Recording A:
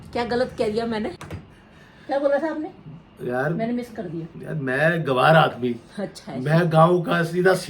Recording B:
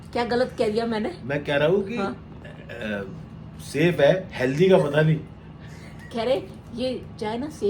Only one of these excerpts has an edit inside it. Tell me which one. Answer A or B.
A